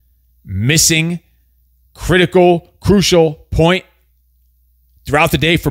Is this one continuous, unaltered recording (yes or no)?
yes